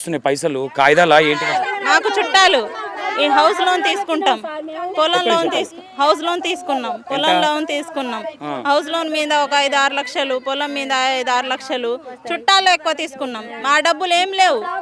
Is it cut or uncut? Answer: uncut